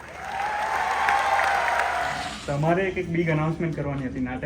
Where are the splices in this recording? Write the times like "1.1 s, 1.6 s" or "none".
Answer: 2.3 s